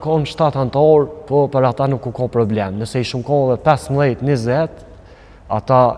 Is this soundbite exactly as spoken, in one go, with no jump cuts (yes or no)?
yes